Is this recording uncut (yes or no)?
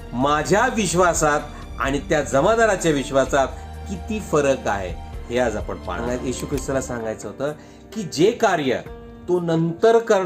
no